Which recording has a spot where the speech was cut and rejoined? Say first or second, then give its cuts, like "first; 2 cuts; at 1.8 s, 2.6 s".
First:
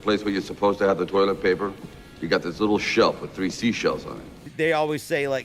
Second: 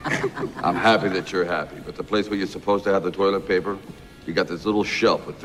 first; 1 cut; at 4.4 s